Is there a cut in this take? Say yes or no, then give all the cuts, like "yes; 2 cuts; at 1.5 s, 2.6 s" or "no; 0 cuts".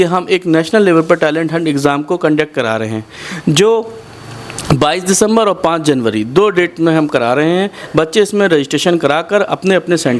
no; 0 cuts